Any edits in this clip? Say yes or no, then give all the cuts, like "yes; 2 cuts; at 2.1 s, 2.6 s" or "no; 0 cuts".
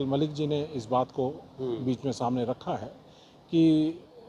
no; 0 cuts